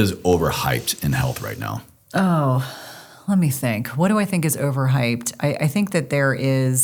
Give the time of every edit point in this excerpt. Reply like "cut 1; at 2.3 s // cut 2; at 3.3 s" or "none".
none